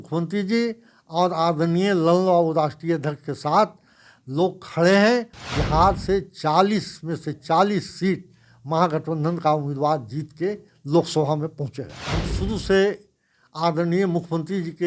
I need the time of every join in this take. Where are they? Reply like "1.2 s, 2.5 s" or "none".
5.4 s, 12.0 s